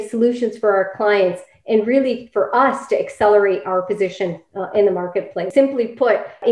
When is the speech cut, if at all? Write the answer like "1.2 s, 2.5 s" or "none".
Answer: 5.5 s